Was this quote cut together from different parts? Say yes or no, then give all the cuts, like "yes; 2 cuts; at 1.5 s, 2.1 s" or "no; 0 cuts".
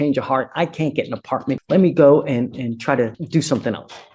yes; 2 cuts; at 1.5 s, 3.2 s